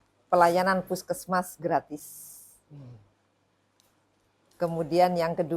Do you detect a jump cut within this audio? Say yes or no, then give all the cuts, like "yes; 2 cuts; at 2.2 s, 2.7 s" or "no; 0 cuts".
no; 0 cuts